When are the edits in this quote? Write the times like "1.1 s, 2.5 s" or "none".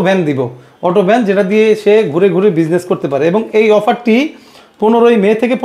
none